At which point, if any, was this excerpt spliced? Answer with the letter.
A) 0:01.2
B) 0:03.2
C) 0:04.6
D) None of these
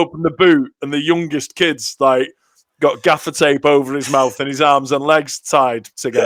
D